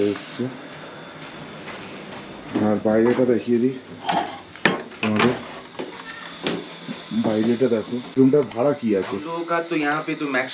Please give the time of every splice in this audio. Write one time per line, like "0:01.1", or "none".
0:08.0